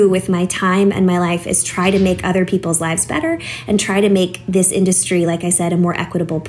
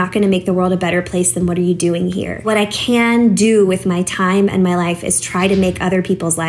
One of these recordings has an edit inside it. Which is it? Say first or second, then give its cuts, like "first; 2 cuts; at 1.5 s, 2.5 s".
second; 1 cut; at 2.4 s